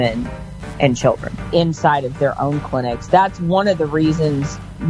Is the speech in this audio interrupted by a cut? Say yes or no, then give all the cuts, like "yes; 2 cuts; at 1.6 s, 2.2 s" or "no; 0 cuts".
yes; 1 cut; at 1.3 s